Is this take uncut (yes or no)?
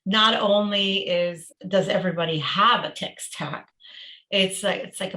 no